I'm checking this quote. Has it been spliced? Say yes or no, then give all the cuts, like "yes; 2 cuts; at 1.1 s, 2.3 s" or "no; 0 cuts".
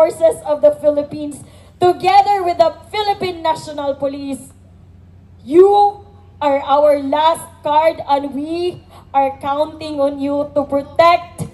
no; 0 cuts